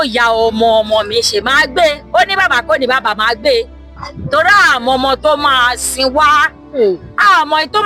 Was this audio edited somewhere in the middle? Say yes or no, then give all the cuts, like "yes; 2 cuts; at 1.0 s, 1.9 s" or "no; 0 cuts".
no; 0 cuts